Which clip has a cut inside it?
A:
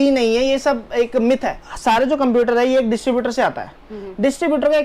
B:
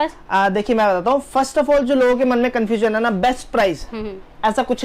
A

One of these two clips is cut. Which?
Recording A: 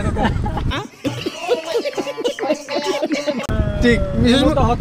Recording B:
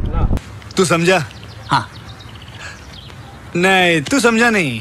A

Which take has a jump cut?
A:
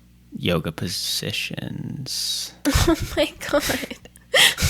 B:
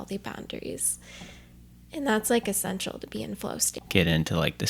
B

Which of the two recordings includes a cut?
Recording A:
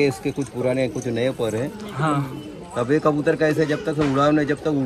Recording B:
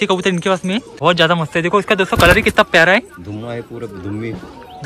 B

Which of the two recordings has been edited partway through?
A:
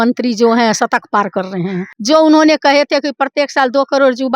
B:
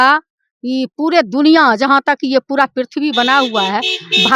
A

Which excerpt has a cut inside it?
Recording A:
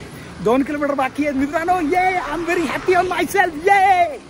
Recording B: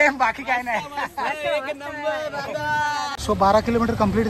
B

